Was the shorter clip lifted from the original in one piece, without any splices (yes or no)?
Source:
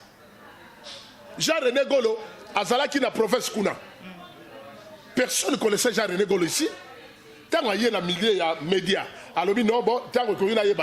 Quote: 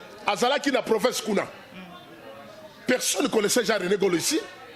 yes